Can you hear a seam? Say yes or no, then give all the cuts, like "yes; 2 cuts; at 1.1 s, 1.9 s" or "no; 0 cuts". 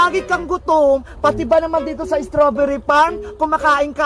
no; 0 cuts